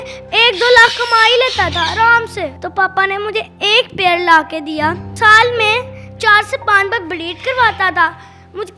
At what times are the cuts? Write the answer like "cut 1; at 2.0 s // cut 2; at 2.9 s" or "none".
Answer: cut 1; at 2.6 s // cut 2; at 5.1 s